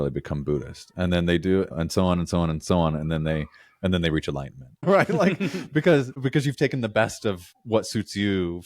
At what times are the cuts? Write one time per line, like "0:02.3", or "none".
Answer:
0:01.7
0:04.8
0:06.1
0:07.5